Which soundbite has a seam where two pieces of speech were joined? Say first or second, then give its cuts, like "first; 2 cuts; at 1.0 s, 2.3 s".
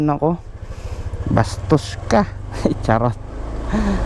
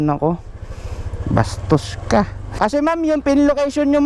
second; 1 cut; at 2.5 s